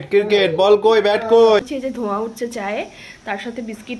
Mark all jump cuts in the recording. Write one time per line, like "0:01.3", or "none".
0:01.6